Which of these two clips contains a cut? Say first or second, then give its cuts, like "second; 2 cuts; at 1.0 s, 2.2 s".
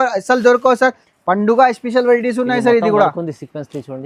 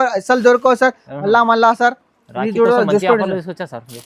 first; 1 cut; at 1.1 s